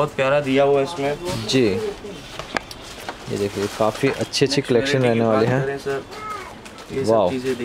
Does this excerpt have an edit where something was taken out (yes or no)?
no